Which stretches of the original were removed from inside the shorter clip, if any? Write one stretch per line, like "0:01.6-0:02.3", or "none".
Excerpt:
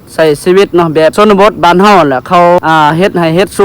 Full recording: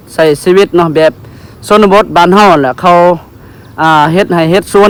0:01.1-0:01.7
0:03.2-0:03.8